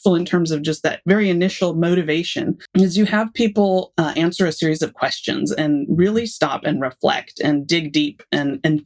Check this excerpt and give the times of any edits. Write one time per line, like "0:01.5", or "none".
0:02.6